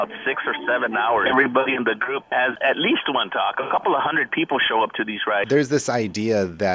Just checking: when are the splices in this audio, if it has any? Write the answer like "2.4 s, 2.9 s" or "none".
1.2 s, 2.5 s, 3.7 s, 5.4 s